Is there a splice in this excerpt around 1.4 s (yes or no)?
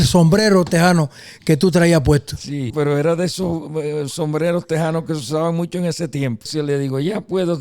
no